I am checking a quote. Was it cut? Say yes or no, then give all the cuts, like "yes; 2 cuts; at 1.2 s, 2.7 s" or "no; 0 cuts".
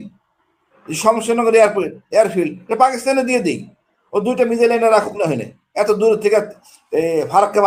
no; 0 cuts